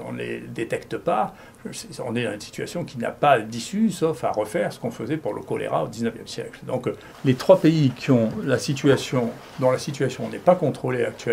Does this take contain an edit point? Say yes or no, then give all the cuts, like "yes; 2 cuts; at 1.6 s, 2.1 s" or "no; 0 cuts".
yes; 1 cut; at 7.0 s